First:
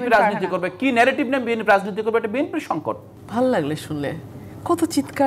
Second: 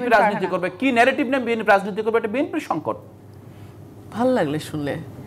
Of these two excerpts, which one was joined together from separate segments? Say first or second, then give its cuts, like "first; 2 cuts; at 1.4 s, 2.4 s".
first; 1 cut; at 3.1 s